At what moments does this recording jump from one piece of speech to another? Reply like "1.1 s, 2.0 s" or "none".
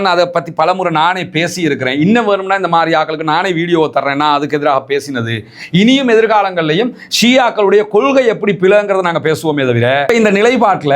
10.0 s

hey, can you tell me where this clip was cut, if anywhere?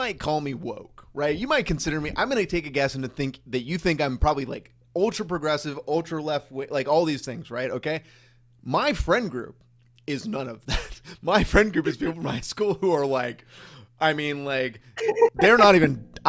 none

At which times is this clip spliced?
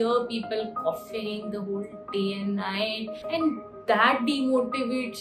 3.2 s

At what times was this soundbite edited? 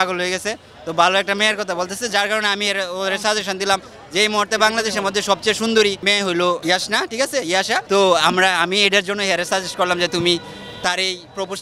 6.3 s, 7.8 s

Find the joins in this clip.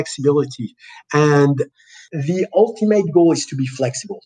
1.9 s

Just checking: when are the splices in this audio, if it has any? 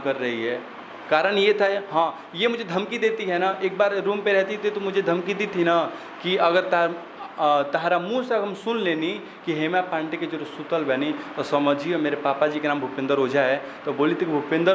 none

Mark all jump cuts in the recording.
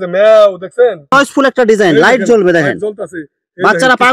1.0 s

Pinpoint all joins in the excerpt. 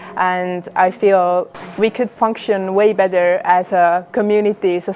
1.5 s

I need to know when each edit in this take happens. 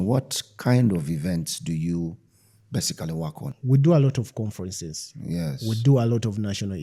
none

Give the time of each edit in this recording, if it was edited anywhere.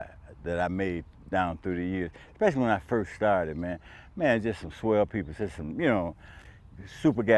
none

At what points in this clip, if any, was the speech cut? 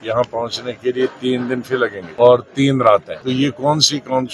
2.0 s, 3.1 s

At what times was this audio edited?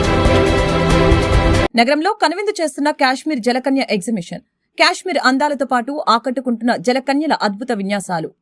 none

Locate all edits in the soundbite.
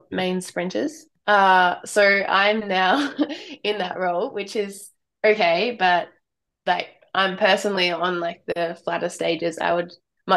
1.1 s

